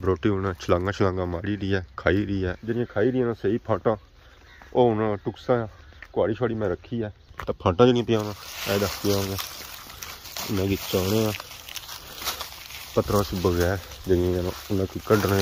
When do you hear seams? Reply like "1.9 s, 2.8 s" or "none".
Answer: 2.6 s, 7.3 s